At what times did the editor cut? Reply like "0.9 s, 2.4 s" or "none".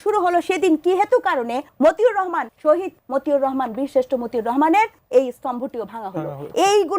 1.6 s, 2.7 s, 5.0 s